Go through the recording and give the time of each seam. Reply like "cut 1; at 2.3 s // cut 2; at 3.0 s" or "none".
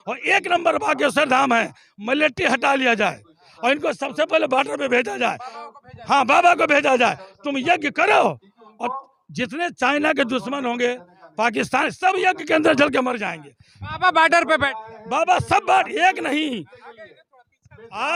none